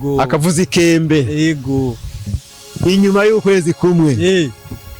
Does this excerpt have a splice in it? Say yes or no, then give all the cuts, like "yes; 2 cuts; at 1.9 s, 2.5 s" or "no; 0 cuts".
yes; 1 cut; at 2.4 s